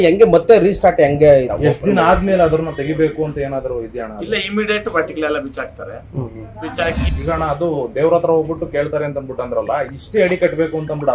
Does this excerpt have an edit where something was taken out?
yes; 1 cut; at 7.0 s

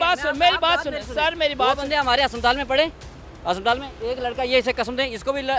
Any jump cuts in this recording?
no; 0 cuts

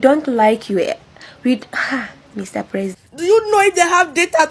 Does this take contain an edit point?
yes; 1 cut; at 3.0 s

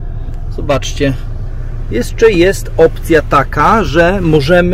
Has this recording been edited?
no; 0 cuts

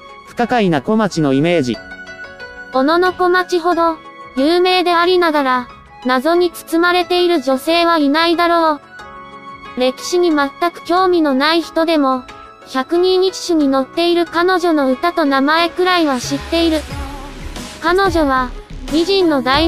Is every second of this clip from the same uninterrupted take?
yes; 0 cuts

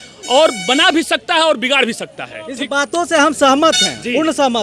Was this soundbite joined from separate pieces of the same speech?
no; 0 cuts

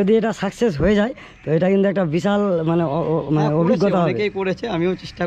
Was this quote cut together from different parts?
no; 0 cuts

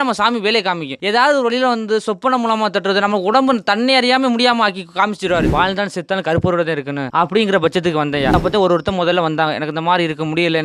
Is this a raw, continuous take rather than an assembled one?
no; 4 cuts; at 0.9 s, 5.5 s, 7.1 s, 8.3 s

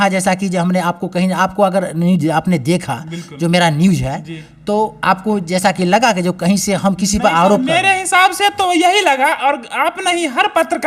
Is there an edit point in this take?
no; 0 cuts

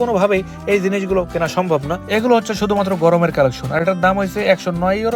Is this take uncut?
yes; 0 cuts

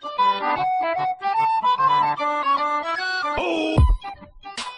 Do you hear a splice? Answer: no; 0 cuts

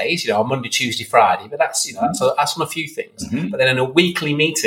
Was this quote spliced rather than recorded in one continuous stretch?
no; 0 cuts

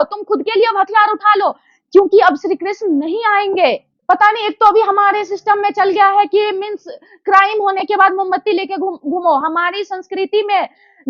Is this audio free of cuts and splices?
yes; 0 cuts

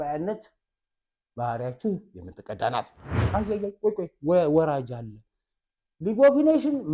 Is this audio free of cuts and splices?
no; 1 cut; at 3.1 s

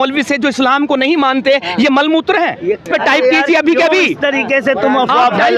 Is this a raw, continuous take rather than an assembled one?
no; 1 cut; at 2.8 s

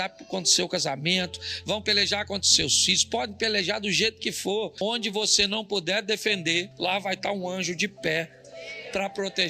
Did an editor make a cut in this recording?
yes; 1 cut; at 4.8 s

